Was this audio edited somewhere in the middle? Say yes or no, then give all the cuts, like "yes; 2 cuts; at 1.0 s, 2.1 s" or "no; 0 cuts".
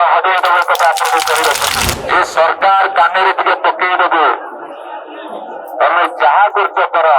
yes; 1 cut; at 1.9 s